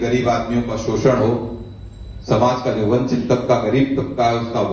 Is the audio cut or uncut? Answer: uncut